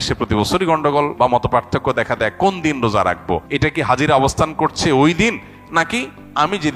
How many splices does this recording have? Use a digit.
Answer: 2